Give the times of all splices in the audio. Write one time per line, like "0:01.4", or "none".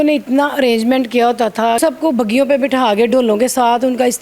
0:01.8